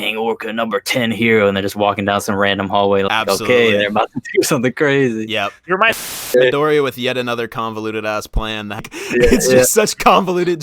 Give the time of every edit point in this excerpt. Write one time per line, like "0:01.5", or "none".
0:06.1
0:08.9